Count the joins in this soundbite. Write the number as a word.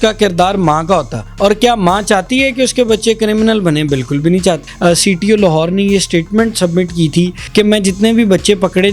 three